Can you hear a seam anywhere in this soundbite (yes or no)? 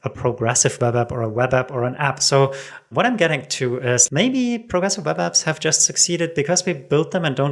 yes